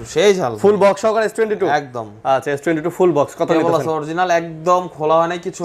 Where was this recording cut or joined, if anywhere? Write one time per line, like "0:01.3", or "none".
none